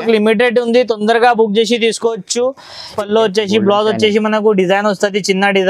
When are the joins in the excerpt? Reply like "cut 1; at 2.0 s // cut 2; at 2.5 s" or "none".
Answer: cut 1; at 2.9 s